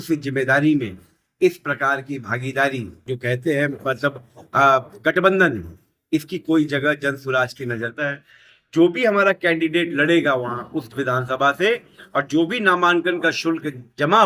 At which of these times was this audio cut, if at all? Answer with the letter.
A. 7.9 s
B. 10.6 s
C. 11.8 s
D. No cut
A